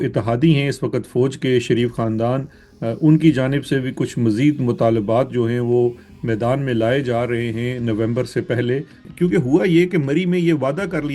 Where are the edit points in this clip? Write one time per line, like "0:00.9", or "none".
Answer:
0:09.0